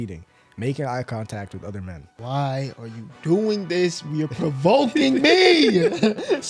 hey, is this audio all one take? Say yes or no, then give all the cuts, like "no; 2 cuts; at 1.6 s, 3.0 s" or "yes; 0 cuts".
no; 1 cut; at 2.1 s